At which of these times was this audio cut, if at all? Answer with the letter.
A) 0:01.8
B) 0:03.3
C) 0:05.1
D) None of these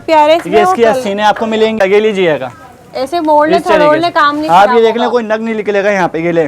A